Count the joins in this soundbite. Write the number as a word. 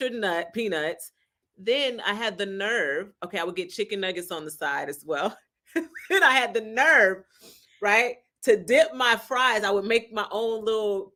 zero